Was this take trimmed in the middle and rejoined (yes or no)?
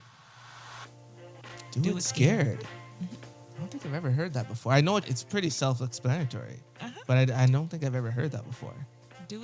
yes